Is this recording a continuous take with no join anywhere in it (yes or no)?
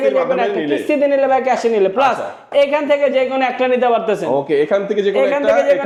yes